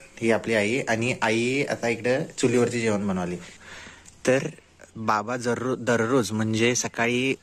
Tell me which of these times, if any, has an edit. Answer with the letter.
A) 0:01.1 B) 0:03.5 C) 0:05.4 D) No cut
B